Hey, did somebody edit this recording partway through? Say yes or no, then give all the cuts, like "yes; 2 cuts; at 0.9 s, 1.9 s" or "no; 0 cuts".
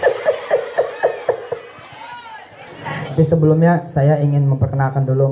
yes; 1 cut; at 3.1 s